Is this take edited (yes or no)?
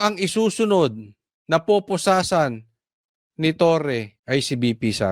yes